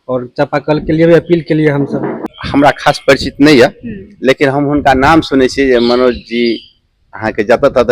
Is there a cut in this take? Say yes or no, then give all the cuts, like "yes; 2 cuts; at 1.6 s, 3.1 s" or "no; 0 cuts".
yes; 1 cut; at 2.4 s